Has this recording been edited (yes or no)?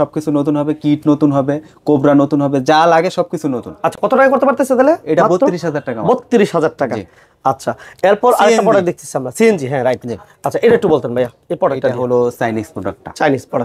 no